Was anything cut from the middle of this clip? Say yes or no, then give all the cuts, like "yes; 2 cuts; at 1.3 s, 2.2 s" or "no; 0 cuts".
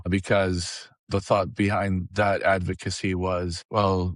yes; 1 cut; at 1.0 s